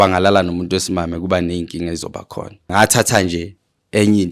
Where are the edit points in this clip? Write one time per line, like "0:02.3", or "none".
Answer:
0:02.7